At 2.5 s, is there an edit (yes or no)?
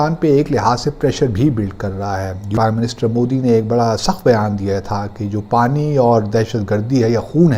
yes